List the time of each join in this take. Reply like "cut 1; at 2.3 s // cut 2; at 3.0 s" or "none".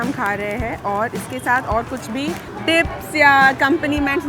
cut 1; at 2.5 s